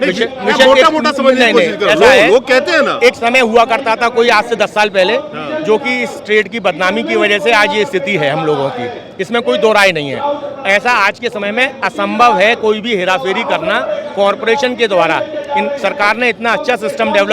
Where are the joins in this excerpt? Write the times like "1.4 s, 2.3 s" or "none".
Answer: none